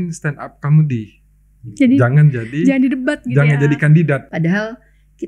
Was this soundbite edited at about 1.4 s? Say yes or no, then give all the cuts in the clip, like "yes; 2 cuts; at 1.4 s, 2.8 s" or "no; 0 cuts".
no; 1 cut; at 4.3 s